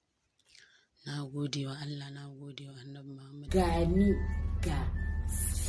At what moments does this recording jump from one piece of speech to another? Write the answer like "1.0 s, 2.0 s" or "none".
3.5 s